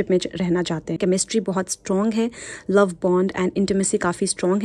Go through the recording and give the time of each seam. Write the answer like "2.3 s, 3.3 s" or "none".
1.0 s

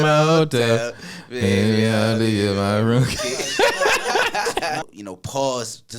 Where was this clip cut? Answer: 4.8 s

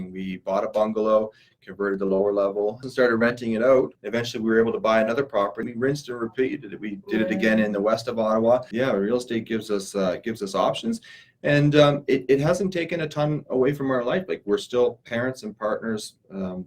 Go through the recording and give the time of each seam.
2.9 s, 4.0 s, 5.6 s, 8.7 s

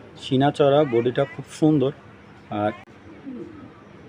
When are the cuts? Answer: 2.8 s

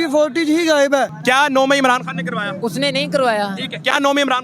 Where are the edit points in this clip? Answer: 1.2 s

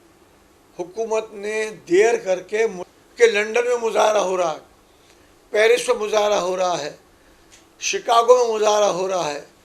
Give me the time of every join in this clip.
2.9 s

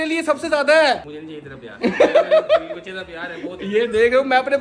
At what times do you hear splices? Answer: none

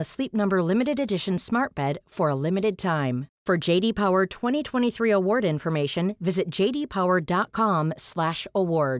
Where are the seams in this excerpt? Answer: none

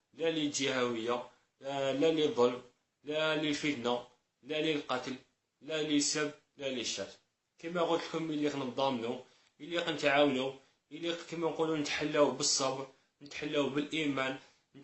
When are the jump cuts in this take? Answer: none

